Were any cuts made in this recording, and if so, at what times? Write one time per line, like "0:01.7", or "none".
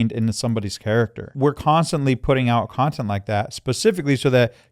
0:01.3